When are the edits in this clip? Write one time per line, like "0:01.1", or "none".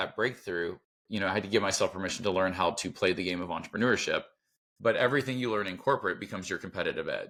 none